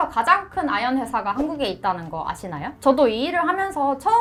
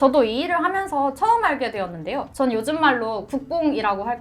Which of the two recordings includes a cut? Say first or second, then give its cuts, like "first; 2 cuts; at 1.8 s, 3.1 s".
second; 1 cut; at 2.3 s